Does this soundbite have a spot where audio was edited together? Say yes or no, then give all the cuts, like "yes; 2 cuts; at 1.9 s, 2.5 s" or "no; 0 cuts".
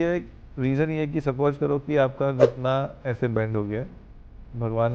no; 0 cuts